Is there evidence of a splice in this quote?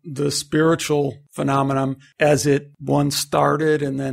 yes; 2 cuts; at 1.7 s, 2.7 s

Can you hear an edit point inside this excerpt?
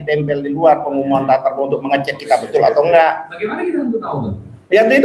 no; 0 cuts

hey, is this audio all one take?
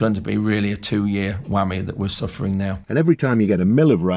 no; 1 cut; at 2.8 s

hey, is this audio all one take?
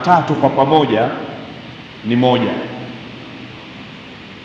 yes; 0 cuts

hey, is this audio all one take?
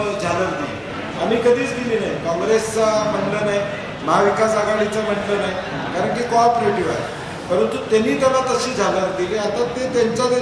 yes; 0 cuts

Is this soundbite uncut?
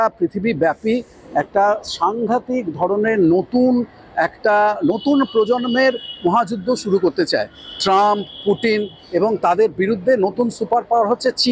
yes; 0 cuts

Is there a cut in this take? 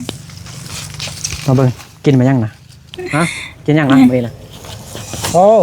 yes; 1 cut; at 3.0 s

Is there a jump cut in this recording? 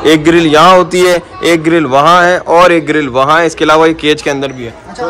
no; 0 cuts

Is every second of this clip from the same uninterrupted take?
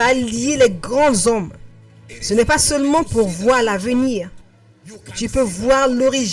yes; 0 cuts

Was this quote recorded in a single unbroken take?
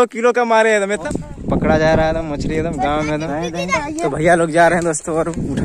no; 2 cuts; at 1.0 s, 3.8 s

